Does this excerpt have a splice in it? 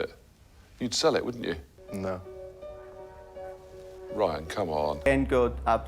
yes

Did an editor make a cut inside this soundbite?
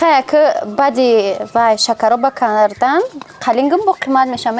no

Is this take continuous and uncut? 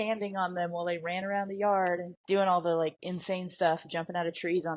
no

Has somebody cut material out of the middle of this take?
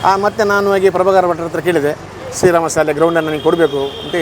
no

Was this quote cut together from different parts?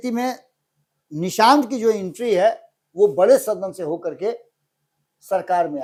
no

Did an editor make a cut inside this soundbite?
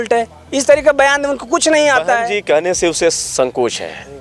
yes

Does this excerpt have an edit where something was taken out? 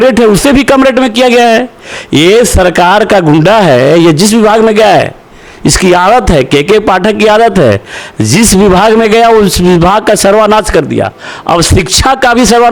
no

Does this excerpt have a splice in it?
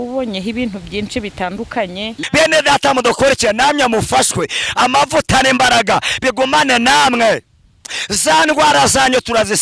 yes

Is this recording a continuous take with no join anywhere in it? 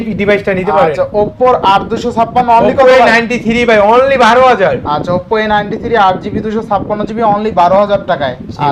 yes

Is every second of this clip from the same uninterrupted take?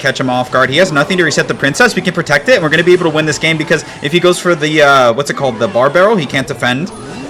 yes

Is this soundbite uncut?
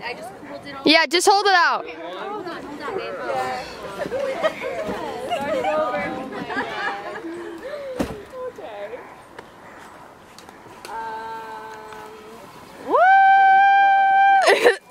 yes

